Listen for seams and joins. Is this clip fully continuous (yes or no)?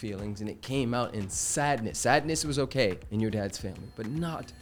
yes